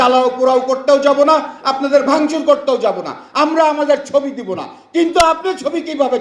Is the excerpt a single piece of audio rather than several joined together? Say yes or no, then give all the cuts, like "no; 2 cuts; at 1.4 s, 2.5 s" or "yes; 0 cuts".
yes; 0 cuts